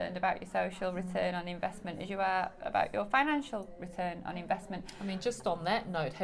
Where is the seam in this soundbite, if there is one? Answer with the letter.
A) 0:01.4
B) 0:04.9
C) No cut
C